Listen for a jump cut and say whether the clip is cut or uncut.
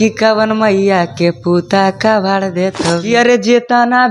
cut